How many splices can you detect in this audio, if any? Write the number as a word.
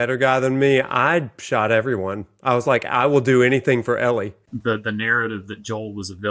one